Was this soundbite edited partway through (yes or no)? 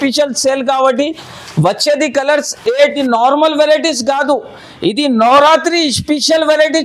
yes